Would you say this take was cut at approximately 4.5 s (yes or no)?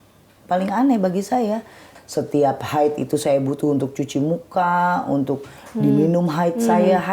no